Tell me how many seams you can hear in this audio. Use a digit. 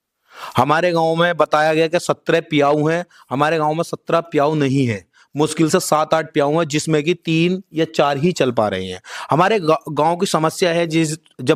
0